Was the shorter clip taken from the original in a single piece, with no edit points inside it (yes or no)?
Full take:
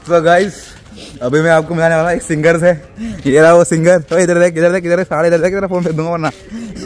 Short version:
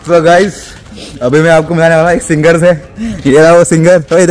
yes